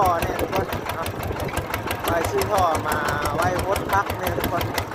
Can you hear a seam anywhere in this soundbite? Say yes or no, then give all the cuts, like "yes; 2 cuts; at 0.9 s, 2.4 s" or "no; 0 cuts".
no; 0 cuts